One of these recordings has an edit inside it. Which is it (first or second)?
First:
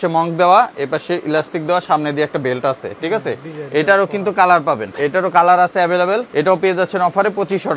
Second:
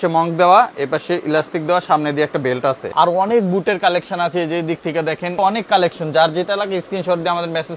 second